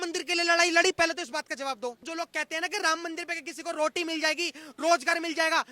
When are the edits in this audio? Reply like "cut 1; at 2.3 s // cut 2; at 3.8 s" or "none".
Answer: cut 1; at 2.1 s